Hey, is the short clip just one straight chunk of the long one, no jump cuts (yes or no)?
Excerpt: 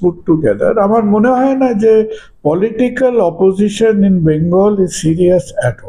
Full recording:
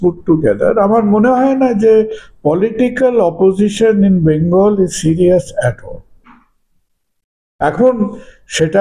yes